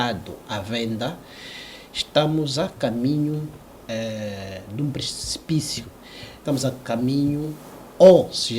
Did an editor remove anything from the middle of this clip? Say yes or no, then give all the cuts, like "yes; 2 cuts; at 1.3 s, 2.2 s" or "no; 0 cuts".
no; 0 cuts